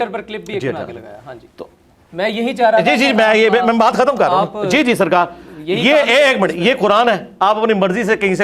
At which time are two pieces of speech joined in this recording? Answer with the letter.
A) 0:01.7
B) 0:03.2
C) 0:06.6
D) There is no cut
D